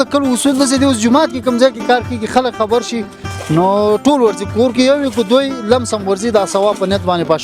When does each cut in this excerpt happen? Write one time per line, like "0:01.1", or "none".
none